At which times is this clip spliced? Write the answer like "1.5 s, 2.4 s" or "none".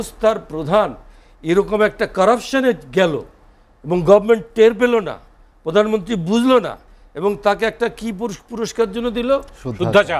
none

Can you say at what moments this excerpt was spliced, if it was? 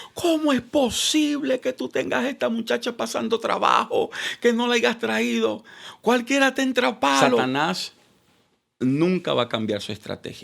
7.4 s

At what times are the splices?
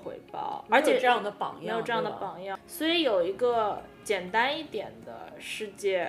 2.6 s

